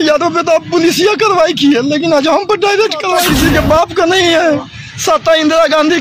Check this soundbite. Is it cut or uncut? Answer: cut